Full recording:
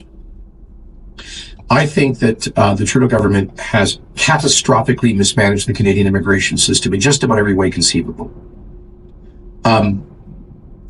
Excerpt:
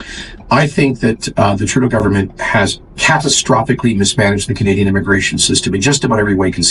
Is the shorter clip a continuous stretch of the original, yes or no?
yes